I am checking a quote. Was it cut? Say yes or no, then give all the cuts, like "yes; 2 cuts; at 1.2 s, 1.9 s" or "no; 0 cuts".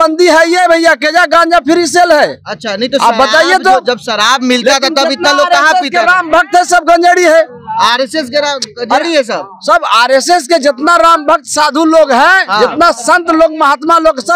no; 0 cuts